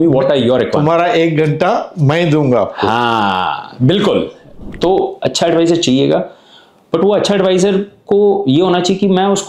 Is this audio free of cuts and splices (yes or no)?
no